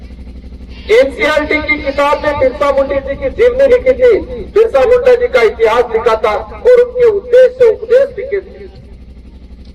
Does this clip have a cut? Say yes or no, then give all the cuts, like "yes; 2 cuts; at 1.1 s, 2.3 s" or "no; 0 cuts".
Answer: no; 0 cuts